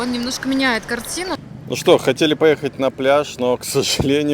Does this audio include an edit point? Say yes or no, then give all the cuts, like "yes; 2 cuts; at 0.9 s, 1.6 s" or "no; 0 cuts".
yes; 1 cut; at 1.4 s